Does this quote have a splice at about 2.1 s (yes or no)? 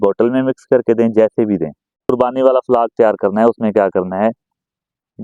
yes